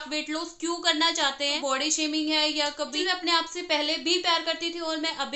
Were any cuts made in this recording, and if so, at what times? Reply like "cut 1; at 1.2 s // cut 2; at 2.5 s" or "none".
cut 1; at 1.6 s // cut 2; at 2.9 s